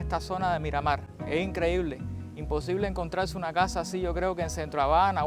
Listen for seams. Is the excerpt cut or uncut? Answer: uncut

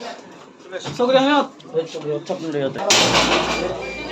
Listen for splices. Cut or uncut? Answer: cut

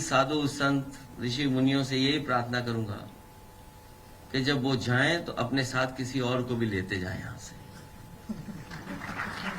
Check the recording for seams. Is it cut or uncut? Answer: cut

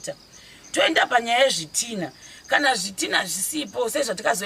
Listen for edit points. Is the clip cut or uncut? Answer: uncut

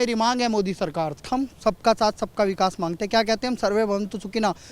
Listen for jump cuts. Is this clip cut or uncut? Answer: cut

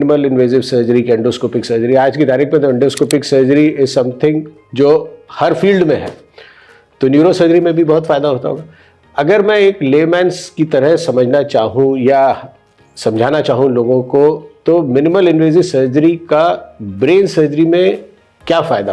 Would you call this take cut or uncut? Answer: uncut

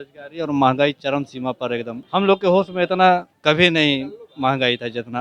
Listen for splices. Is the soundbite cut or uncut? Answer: cut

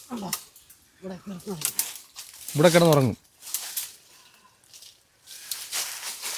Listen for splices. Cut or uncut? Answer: uncut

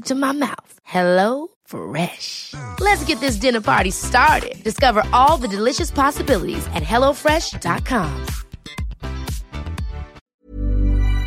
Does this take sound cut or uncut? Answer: cut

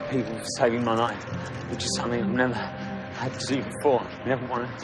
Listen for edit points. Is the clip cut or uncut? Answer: uncut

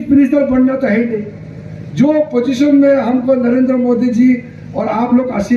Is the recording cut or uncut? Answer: uncut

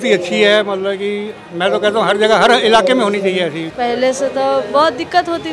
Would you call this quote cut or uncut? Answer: cut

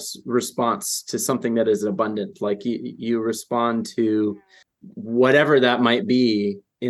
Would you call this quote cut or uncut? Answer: uncut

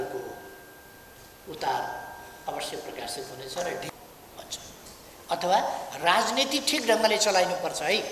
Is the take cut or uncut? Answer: cut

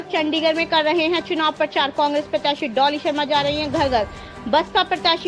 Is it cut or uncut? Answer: uncut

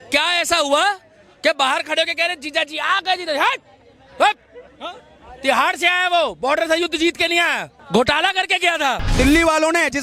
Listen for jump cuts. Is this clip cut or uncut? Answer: cut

